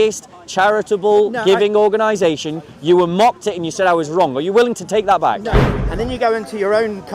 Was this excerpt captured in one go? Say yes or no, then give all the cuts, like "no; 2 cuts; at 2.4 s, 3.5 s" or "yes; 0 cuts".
no; 1 cut; at 5.7 s